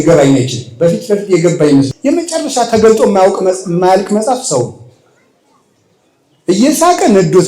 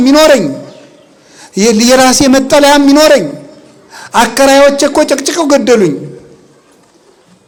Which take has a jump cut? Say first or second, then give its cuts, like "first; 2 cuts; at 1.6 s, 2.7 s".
first; 1 cut; at 1.9 s